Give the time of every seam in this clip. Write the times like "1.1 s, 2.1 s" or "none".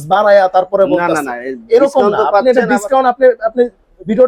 none